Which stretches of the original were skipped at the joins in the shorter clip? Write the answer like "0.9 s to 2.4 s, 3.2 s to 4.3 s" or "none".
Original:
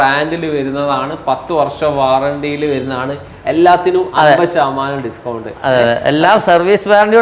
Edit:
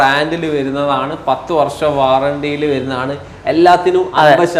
none